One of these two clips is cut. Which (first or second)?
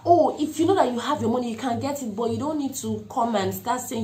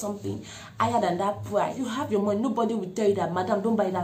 second